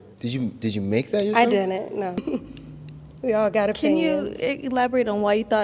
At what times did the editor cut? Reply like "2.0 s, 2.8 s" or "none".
2.2 s